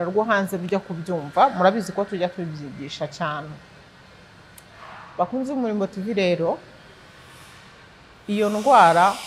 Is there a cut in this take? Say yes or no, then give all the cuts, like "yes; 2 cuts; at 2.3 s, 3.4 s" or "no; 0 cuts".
no; 0 cuts